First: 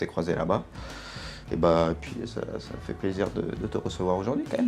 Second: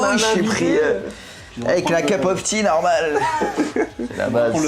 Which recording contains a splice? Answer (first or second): second